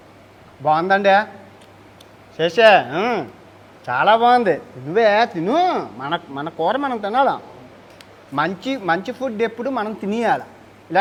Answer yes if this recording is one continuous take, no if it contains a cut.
yes